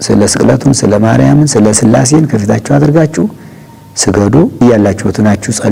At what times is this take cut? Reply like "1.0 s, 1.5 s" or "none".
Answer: 4.5 s